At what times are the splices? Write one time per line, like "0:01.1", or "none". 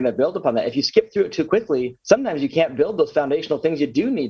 0:01.9